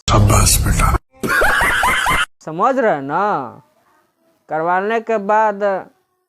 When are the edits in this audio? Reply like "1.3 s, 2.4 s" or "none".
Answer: 2.4 s